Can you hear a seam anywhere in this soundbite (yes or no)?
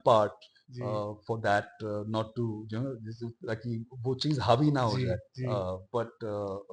no